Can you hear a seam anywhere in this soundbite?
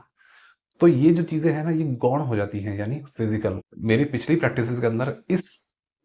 yes; 1 cut; at 3.7 s

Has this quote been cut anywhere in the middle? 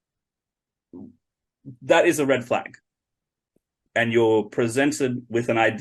yes; 1 cut; at 3.8 s

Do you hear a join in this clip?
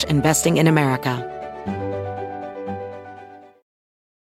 yes; 1 cut; at 1.2 s

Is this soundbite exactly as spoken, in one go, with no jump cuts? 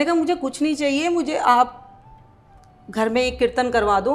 yes; 0 cuts

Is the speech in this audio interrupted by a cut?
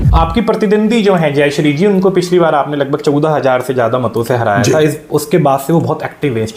no; 0 cuts

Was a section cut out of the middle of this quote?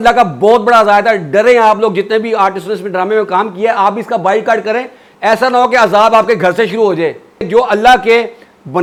no; 0 cuts

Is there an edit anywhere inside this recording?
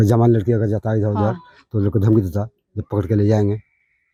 no; 0 cuts

